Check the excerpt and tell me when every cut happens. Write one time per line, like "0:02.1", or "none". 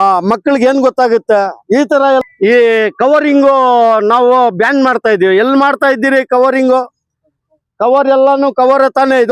0:02.2